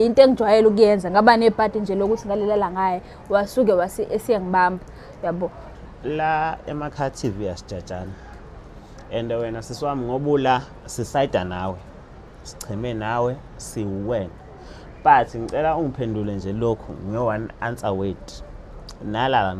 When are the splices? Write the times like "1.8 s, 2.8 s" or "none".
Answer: 5.7 s